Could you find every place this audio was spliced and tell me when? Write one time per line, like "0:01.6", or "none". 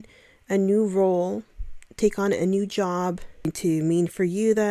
0:03.5